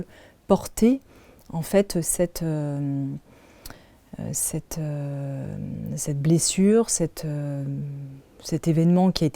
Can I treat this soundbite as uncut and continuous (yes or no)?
yes